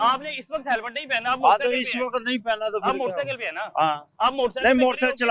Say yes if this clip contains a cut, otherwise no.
no